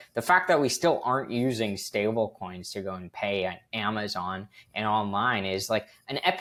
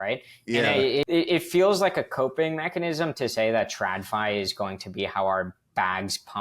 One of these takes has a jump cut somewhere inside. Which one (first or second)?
second